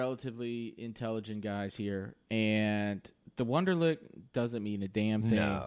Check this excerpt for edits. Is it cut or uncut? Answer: uncut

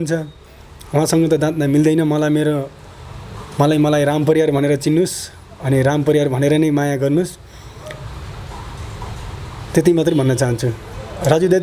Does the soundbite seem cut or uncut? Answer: uncut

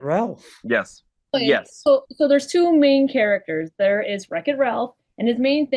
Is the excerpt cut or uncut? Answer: cut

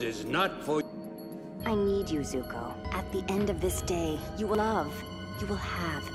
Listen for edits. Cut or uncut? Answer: uncut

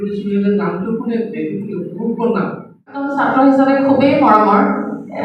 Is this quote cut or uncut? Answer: cut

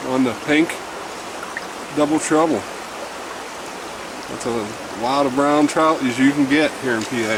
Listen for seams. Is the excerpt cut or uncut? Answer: uncut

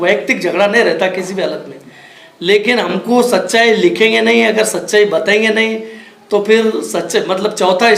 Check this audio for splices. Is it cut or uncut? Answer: uncut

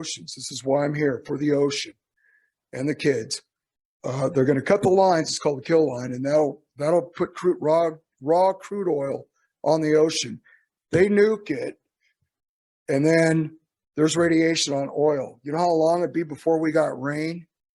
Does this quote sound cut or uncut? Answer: uncut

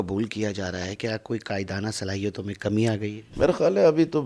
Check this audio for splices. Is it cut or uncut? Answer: uncut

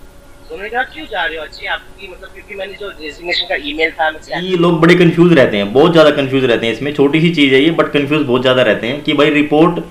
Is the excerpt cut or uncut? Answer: cut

